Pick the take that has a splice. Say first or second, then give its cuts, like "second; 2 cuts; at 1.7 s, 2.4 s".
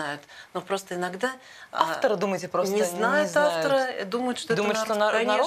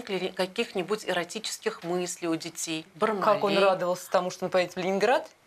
second; 1 cut; at 2.9 s